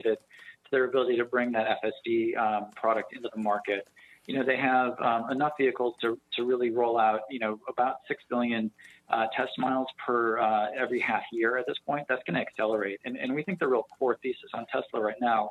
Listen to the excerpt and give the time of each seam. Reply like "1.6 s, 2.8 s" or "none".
none